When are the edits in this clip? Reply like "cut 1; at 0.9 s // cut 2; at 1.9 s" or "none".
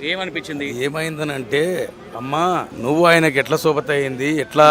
cut 1; at 2.7 s